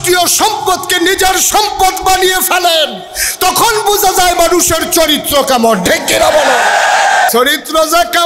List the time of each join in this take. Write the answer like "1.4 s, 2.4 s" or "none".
7.3 s